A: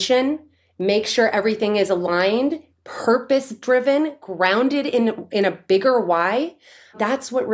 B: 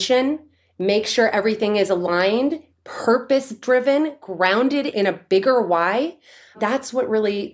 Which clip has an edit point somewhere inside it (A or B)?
B